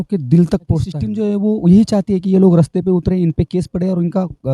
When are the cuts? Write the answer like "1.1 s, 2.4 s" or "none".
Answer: 1.0 s